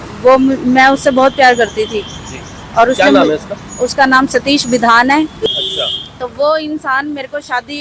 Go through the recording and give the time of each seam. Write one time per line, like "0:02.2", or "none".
0:05.5